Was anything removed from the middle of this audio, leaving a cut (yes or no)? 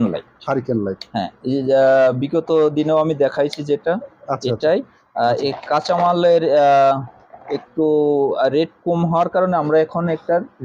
no